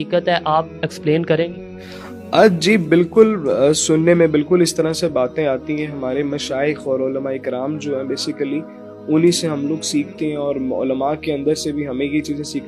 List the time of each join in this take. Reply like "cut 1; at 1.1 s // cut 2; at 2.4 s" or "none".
none